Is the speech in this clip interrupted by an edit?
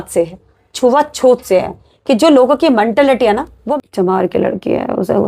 yes; 1 cut; at 3.6 s

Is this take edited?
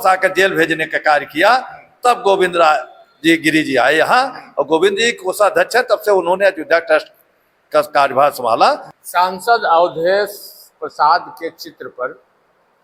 yes; 1 cut; at 8.9 s

